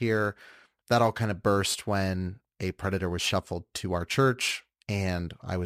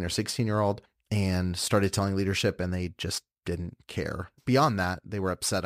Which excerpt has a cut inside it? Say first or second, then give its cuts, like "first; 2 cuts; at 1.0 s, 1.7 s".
second; 2 cuts; at 0.9 s, 4.3 s